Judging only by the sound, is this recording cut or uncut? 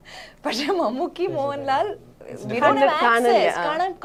uncut